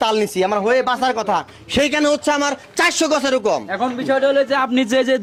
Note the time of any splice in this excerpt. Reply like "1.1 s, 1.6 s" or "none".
none